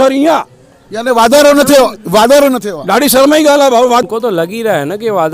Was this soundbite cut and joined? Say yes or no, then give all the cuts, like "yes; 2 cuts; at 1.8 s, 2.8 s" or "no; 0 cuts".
yes; 1 cut; at 4.0 s